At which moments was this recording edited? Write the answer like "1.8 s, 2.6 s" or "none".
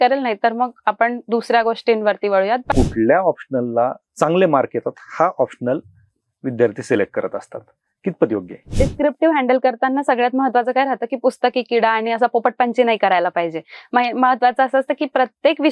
2.7 s, 8.6 s